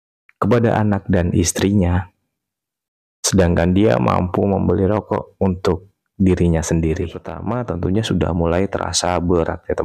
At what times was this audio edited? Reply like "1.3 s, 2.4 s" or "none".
7.3 s